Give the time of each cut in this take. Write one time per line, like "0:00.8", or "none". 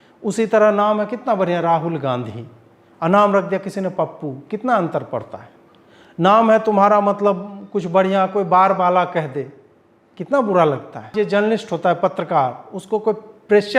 0:11.1